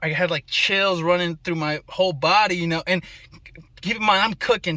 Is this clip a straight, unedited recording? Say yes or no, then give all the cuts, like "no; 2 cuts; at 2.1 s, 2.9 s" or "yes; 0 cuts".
yes; 0 cuts